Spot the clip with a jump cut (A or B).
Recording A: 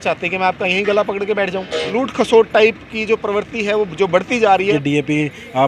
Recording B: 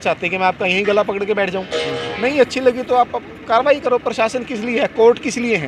A